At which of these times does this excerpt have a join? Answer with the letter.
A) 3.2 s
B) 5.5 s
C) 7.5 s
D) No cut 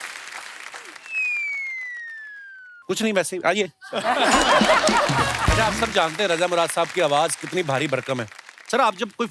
B